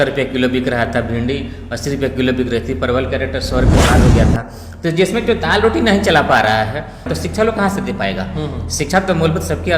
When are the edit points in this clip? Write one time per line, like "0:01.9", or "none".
0:07.1